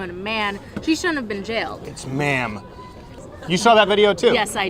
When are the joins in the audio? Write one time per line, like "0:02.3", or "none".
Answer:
0:01.8
0:03.1